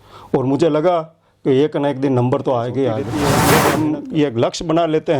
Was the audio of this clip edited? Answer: yes; 1 cut; at 3.3 s

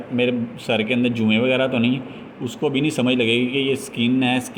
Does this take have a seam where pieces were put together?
no; 0 cuts

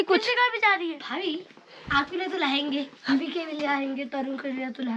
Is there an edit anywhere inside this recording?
no; 0 cuts

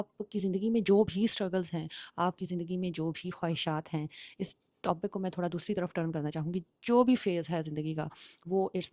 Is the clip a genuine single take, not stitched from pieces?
yes; 0 cuts

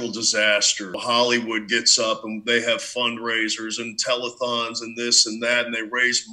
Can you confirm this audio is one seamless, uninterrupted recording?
no; 1 cut; at 1.0 s

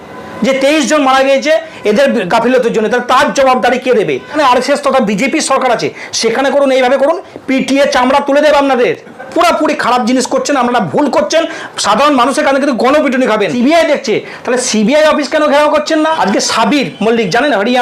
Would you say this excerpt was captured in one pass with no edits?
no; 4 cuts; at 4.3 s, 9.3 s, 13.5 s, 16.2 s

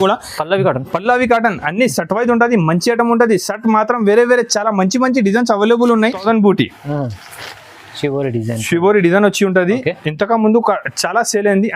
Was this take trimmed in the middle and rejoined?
yes; 1 cut; at 6.2 s

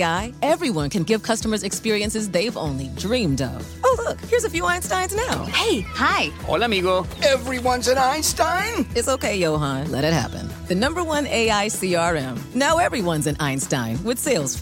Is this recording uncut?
yes; 0 cuts

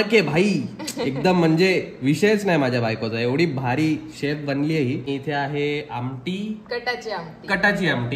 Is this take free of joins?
no; 1 cut; at 5.1 s

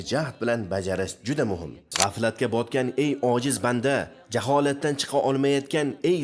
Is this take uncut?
no; 1 cut; at 1.8 s

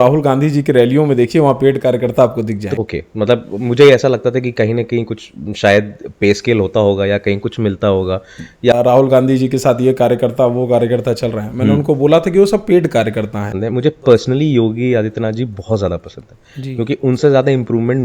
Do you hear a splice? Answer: yes; 3 cuts; at 2.8 s, 8.7 s, 13.5 s

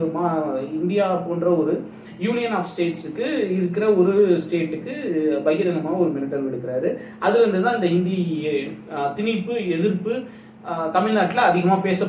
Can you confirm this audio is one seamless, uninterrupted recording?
yes; 0 cuts

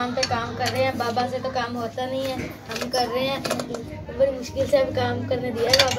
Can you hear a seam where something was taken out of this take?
yes; 2 cuts; at 2.6 s, 3.7 s

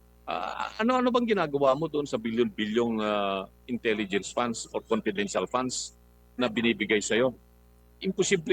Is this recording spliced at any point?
no; 0 cuts

